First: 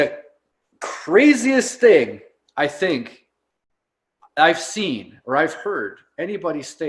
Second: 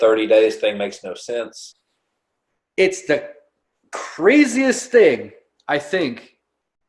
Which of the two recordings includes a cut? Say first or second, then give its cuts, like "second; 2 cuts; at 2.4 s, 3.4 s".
second; 1 cut; at 1.6 s